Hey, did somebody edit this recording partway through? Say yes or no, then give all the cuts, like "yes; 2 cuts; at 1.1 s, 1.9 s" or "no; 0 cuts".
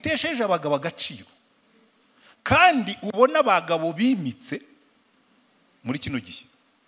no; 0 cuts